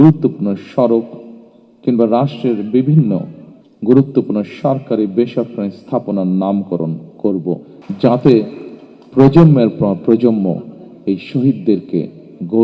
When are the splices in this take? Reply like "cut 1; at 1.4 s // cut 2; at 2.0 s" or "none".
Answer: cut 1; at 7.7 s

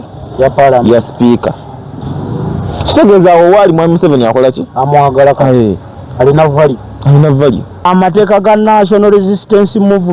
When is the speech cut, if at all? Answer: cut 1; at 7.7 s

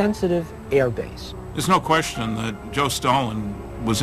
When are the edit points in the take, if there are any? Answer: cut 1; at 1.0 s

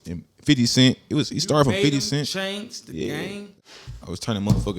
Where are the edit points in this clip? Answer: cut 1; at 3.5 s

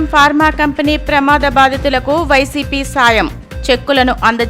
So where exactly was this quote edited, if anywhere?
none

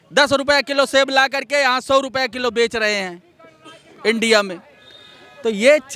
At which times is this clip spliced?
none

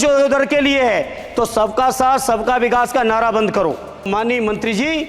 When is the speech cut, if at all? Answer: cut 1; at 3.9 s

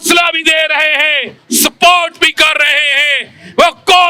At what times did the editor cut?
cut 1; at 1.4 s

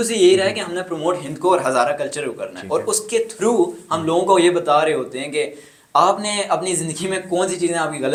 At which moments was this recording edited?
none

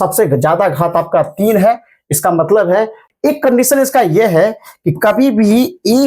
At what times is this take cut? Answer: cut 1; at 3.0 s

